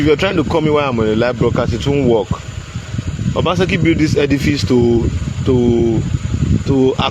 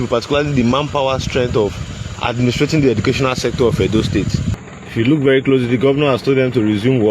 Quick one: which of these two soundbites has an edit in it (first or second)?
second